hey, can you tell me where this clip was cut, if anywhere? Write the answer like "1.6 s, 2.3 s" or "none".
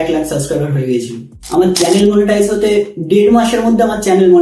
1.4 s